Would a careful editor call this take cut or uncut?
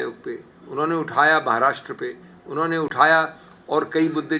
uncut